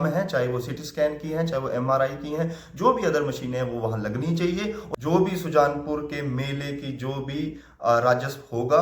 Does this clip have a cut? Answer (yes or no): no